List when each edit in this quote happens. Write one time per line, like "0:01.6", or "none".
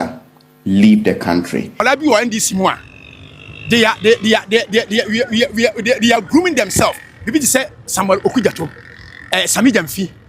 0:01.7